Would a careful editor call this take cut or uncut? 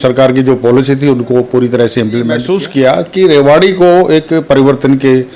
cut